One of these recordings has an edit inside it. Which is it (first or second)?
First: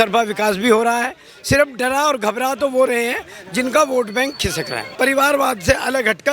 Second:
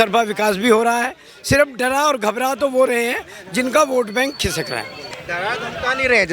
first